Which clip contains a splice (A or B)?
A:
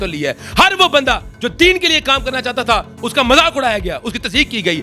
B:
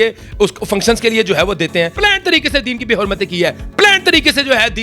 B